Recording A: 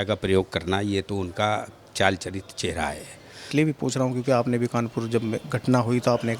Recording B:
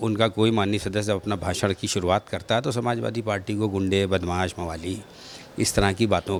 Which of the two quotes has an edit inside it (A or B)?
A